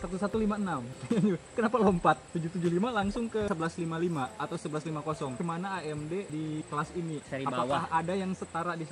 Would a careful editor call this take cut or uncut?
cut